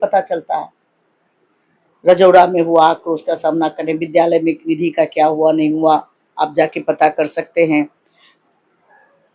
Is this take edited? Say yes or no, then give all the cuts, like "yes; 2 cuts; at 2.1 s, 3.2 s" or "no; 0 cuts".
no; 0 cuts